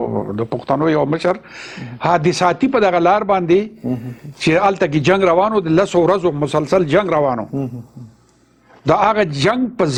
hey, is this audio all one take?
yes; 0 cuts

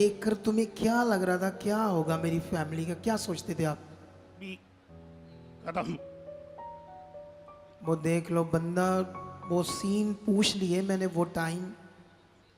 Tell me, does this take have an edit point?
no; 0 cuts

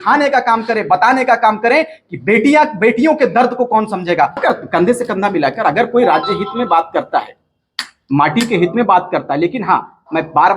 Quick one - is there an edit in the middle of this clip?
yes; 1 cut; at 4.4 s

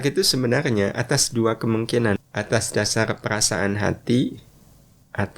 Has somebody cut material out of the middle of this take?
yes; 1 cut; at 2.2 s

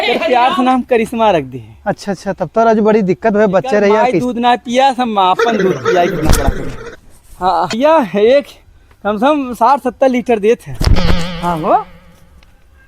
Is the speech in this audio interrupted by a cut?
yes; 1 cut; at 7.8 s

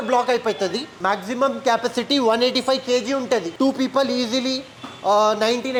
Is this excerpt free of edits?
yes; 0 cuts

